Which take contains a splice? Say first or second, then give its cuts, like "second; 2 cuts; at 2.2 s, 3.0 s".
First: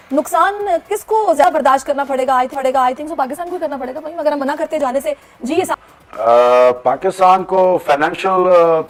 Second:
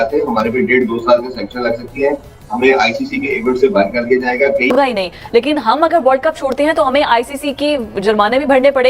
second; 1 cut; at 4.7 s